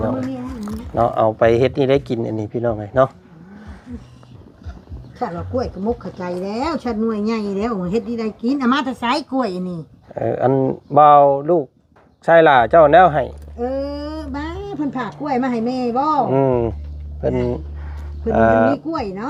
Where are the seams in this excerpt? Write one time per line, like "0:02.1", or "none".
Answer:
none

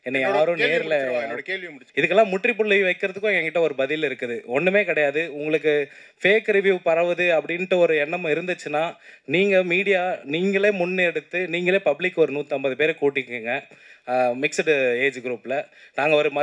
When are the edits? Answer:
0:01.8

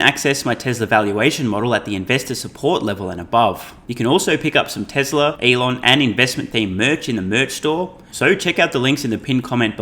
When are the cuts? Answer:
0:03.8
0:05.4
0:08.0

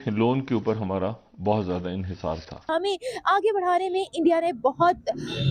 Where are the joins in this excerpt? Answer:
0:02.7

